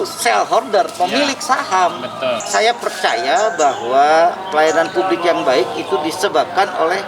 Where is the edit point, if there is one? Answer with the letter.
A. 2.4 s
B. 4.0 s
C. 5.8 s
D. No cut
A